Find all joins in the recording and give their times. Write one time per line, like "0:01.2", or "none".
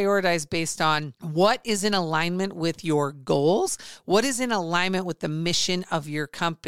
0:01.2